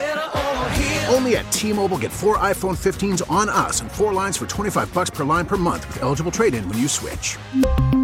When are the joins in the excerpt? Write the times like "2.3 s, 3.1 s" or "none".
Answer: none